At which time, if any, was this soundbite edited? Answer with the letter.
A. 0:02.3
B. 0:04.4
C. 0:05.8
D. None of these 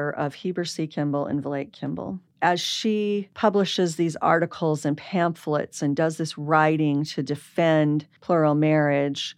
A